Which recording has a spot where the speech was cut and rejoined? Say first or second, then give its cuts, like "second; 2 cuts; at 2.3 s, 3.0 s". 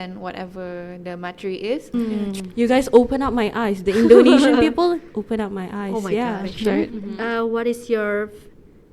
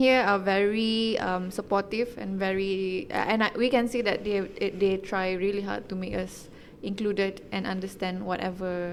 first; 2 cuts; at 1.9 s, 6.8 s